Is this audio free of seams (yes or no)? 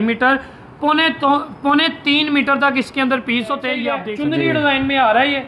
no